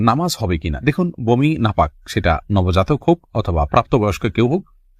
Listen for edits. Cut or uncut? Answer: uncut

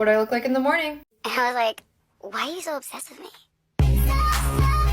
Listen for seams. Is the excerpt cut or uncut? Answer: cut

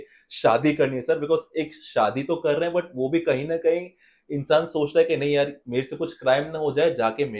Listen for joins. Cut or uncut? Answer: uncut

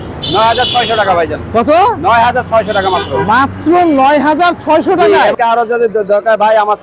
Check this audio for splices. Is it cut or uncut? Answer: cut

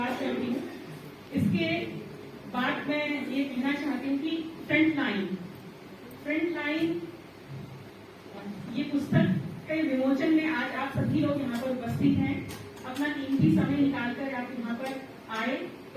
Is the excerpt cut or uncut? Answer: uncut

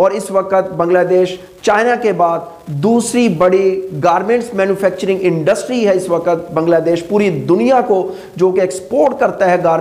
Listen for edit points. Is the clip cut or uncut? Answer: uncut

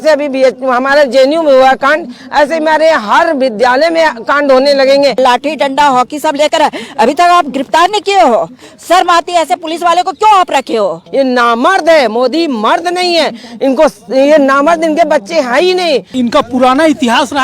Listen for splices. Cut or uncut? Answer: cut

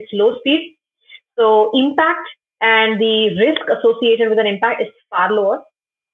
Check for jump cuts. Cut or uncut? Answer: uncut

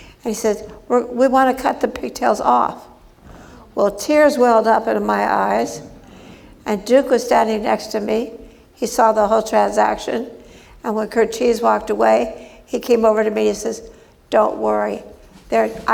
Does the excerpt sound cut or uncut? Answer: uncut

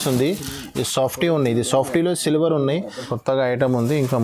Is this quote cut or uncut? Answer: cut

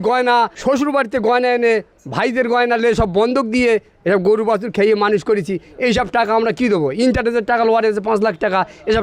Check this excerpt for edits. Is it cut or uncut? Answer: uncut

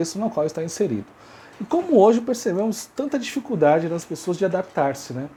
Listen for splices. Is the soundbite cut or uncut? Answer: uncut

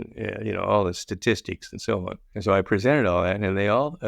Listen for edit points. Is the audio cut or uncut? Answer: cut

